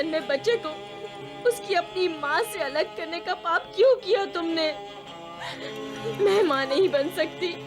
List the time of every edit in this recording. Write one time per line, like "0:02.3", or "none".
0:05.9